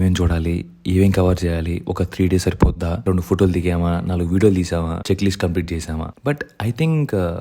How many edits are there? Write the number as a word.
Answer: one